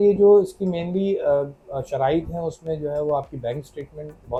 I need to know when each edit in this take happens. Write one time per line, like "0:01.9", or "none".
none